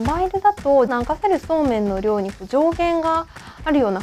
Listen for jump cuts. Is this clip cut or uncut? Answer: cut